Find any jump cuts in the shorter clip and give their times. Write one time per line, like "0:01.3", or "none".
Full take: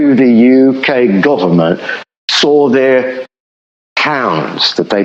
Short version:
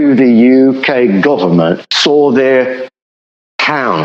0:01.9